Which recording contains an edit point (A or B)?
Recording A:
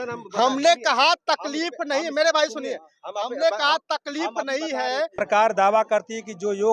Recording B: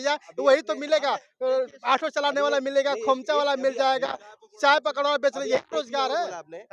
A